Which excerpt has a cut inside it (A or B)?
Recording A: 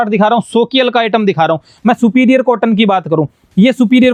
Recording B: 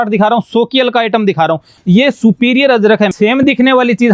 B